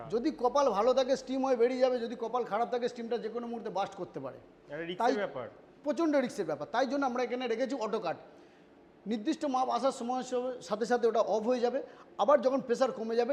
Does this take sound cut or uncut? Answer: uncut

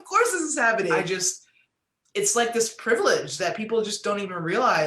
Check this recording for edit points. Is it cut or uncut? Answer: cut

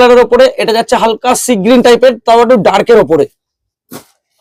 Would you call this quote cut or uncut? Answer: uncut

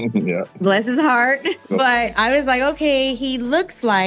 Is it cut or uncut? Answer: cut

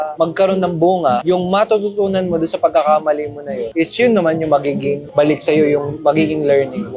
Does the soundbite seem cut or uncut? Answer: uncut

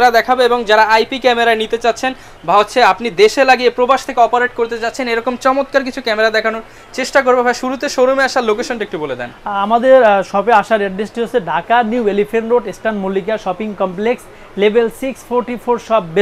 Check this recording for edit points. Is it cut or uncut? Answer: uncut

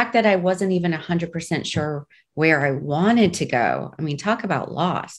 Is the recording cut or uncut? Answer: uncut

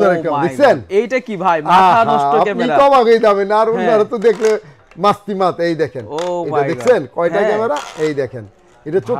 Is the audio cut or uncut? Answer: uncut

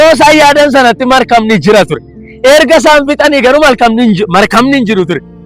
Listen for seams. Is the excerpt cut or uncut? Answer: uncut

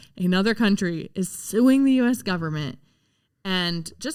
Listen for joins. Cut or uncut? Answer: uncut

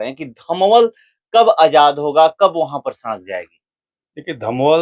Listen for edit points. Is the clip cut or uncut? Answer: uncut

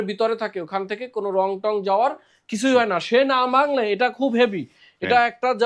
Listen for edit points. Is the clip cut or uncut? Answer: uncut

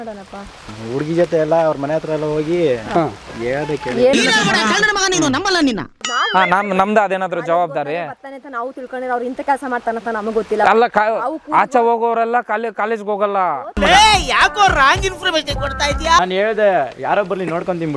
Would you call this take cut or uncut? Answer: cut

